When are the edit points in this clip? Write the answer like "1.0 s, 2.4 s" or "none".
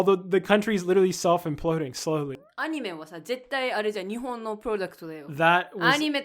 2.5 s